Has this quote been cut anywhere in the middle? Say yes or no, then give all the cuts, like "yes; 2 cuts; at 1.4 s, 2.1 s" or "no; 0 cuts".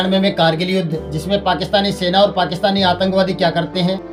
no; 0 cuts